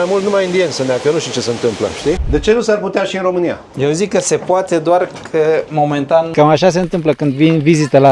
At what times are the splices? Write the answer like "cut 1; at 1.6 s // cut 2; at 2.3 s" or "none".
cut 1; at 2.2 s // cut 2; at 3.6 s // cut 3; at 6.3 s

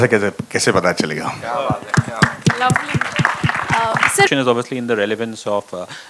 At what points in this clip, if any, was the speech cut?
cut 1; at 4.3 s

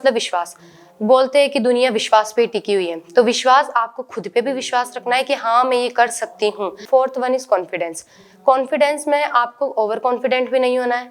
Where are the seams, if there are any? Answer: cut 1; at 6.8 s

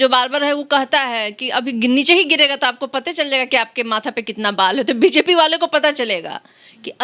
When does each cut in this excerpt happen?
none

